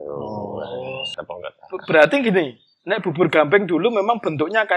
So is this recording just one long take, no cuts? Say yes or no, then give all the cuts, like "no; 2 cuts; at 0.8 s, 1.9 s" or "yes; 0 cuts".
no; 1 cut; at 1.1 s